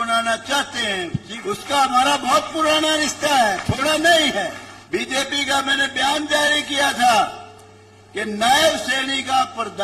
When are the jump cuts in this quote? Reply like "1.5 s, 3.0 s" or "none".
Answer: 1.3 s, 4.7 s